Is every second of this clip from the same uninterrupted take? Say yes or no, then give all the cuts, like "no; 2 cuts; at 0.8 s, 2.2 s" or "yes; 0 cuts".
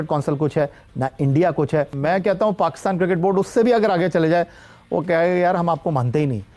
no; 1 cut; at 2.0 s